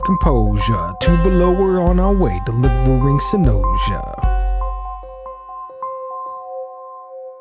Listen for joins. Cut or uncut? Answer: uncut